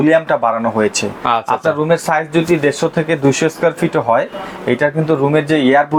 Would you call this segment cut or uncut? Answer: uncut